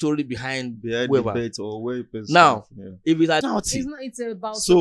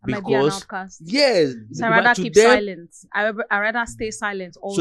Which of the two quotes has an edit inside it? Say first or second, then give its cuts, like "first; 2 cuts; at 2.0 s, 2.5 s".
first; 1 cut; at 3.4 s